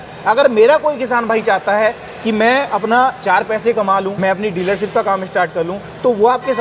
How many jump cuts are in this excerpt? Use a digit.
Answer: 1